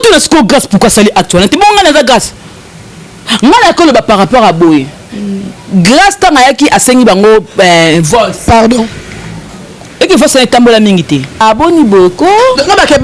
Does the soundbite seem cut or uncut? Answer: cut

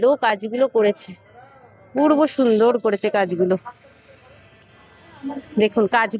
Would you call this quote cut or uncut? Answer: uncut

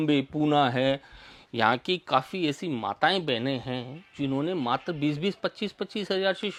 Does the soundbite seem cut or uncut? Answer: uncut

